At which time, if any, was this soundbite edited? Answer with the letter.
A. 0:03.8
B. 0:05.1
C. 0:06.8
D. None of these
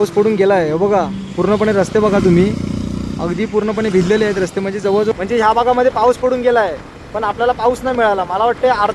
B